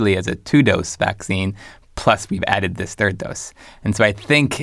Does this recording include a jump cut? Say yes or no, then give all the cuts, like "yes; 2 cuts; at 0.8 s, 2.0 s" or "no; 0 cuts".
no; 0 cuts